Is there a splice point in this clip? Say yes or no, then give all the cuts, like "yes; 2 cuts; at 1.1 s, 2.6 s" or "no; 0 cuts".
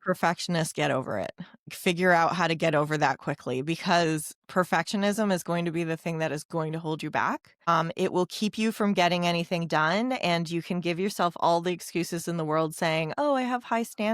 yes; 2 cuts; at 1.7 s, 7.5 s